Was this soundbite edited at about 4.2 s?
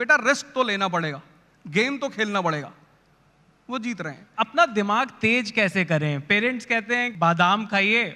yes; 2 cuts; at 4.2 s, 7.1 s

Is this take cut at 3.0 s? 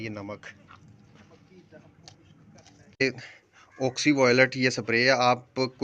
yes; 1 cut; at 3.0 s

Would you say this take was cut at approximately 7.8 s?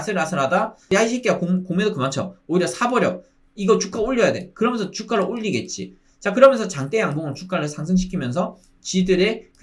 no; 1 cut; at 0.9 s

